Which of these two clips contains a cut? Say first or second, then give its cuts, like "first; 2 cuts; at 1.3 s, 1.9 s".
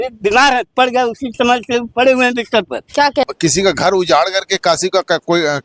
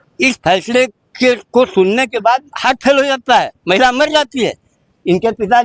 first; 1 cut; at 3.3 s